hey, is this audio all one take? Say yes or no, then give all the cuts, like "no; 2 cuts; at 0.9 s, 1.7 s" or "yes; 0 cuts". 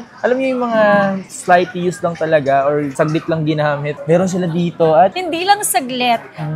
yes; 0 cuts